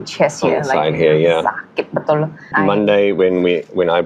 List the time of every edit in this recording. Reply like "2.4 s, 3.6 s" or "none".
2.5 s

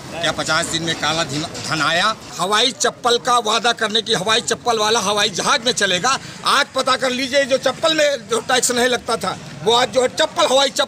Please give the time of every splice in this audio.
2.3 s

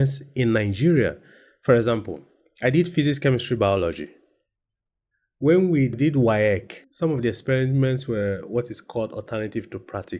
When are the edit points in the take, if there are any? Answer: 6.0 s, 6.8 s

